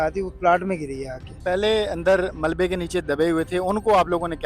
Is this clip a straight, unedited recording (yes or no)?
no